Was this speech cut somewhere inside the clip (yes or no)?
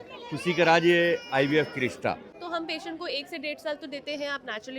yes